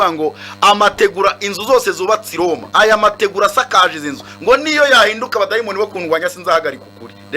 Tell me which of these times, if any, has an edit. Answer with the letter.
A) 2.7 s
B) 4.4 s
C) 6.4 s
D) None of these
A